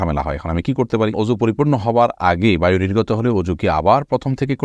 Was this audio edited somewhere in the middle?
yes; 1 cut; at 1.1 s

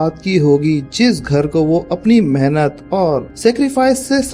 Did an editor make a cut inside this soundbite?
yes; 1 cut; at 3.3 s

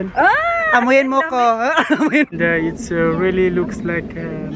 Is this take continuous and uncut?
no; 1 cut; at 2.3 s

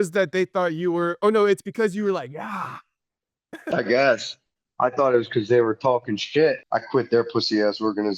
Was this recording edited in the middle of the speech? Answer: yes; 1 cut; at 6.6 s

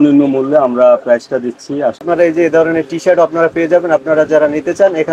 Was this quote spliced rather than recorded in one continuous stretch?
yes; 1 cut; at 2.0 s

